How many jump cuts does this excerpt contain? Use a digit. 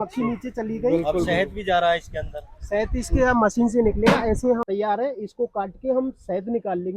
1